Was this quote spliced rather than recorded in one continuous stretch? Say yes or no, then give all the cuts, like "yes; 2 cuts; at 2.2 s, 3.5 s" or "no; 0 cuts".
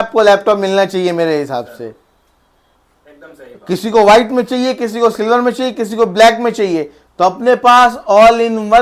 no; 0 cuts